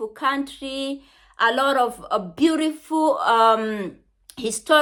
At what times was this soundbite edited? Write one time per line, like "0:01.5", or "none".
none